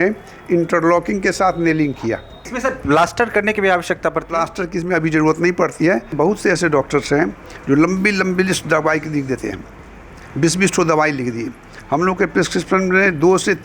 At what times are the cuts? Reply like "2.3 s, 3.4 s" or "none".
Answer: 2.5 s, 6.1 s